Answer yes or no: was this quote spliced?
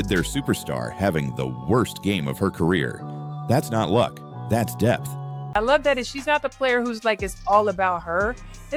no